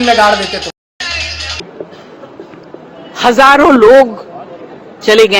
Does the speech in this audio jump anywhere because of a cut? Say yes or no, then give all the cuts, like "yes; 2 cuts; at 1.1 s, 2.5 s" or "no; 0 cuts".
yes; 1 cut; at 1.7 s